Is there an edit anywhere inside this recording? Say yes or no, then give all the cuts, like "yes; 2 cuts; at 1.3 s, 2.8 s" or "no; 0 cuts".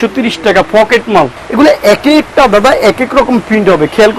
yes; 1 cut; at 1.4 s